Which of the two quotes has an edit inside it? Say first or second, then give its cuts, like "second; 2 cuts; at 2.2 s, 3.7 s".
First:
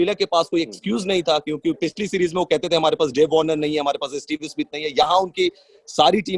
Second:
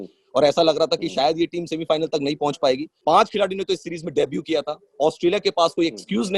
second; 1 cut; at 2.9 s